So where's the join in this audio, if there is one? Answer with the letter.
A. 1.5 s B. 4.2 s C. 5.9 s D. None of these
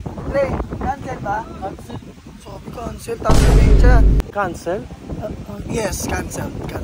B